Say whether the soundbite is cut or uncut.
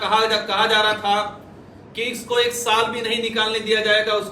uncut